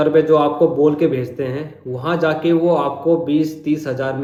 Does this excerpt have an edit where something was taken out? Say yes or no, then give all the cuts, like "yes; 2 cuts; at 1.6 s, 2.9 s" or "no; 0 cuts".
no; 0 cuts